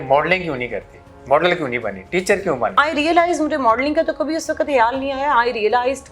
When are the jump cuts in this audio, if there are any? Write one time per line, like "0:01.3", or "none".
0:02.8